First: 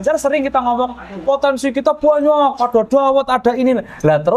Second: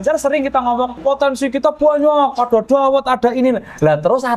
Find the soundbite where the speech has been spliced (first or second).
second